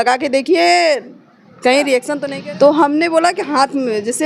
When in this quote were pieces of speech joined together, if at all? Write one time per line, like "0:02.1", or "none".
0:02.2